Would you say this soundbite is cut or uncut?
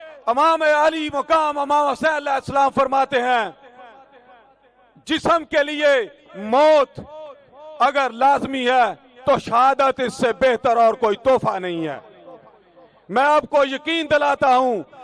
uncut